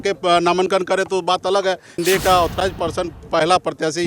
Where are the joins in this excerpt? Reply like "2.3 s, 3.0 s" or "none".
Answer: 2.0 s

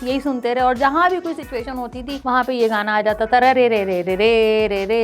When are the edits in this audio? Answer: 2.1 s

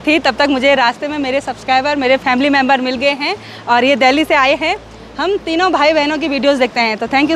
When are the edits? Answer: none

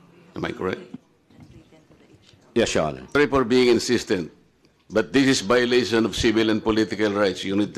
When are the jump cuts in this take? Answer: 3.2 s

